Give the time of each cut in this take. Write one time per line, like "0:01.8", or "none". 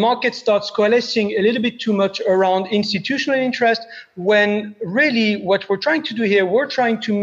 none